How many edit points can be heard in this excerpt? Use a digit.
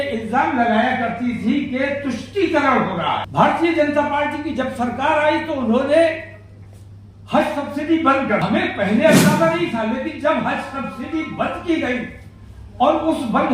2